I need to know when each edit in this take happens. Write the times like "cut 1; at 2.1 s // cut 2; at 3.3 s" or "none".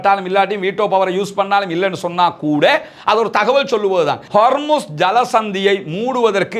cut 1; at 4.2 s